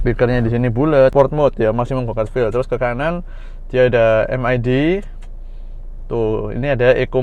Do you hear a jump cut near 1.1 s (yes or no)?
yes